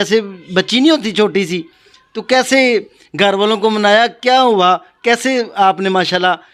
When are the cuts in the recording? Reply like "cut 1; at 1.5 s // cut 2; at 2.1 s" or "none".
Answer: none